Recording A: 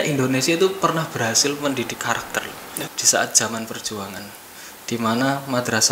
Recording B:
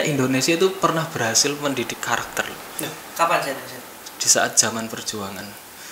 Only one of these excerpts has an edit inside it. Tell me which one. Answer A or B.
A